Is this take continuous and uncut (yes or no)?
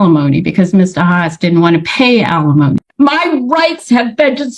no